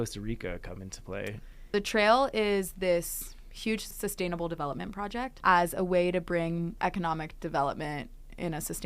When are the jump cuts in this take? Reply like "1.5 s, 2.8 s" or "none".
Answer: 1.7 s, 3.9 s, 5.3 s, 6.7 s

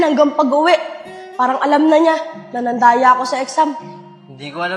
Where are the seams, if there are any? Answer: none

